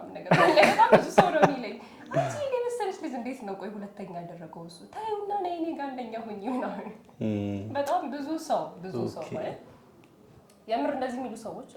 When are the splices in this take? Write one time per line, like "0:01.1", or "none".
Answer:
none